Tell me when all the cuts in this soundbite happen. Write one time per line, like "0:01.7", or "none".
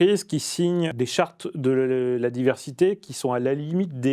0:00.9